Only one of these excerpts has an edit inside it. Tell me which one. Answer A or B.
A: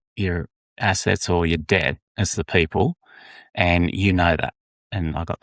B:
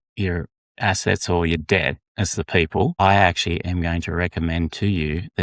B